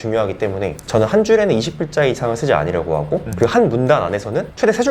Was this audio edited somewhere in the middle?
no; 0 cuts

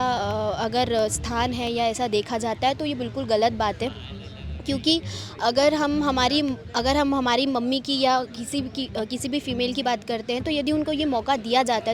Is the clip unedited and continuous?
yes; 0 cuts

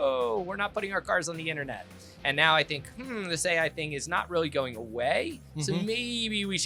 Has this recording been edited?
no; 0 cuts

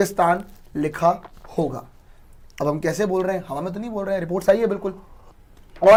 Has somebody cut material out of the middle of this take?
no; 0 cuts

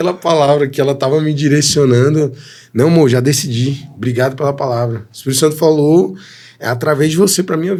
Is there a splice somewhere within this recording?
no; 0 cuts

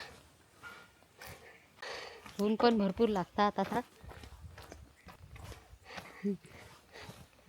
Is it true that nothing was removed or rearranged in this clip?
no; 2 cuts; at 1.8 s, 5.2 s

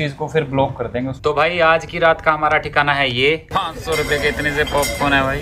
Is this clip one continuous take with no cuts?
no; 2 cuts; at 1.0 s, 3.5 s

